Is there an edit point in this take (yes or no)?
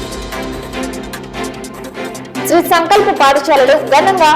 yes